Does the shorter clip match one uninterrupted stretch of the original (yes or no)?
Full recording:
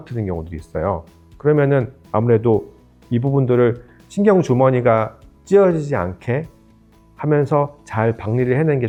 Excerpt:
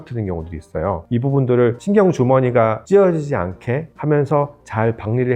no